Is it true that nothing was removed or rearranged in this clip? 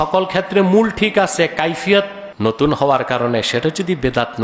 no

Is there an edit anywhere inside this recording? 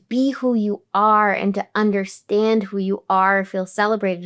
no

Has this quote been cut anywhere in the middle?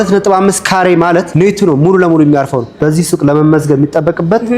yes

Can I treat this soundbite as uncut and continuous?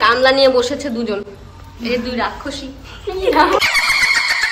no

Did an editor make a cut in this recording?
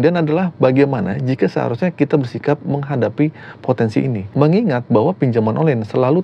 no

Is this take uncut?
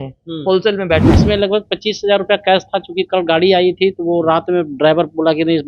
no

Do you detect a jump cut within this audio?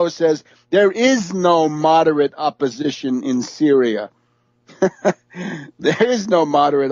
yes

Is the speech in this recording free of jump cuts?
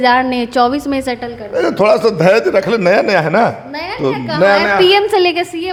yes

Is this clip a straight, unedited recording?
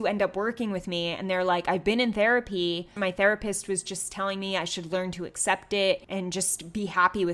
no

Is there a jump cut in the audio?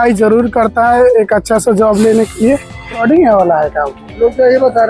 yes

